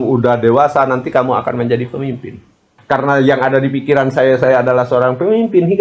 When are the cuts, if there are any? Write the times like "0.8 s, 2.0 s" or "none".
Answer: 2.7 s